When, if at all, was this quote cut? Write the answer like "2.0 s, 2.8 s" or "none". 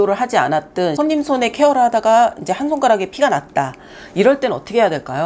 0.9 s